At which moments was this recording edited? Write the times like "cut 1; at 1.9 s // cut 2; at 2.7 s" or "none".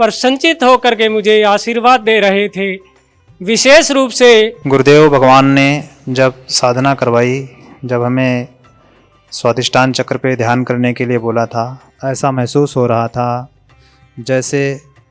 cut 1; at 4.6 s // cut 2; at 11.8 s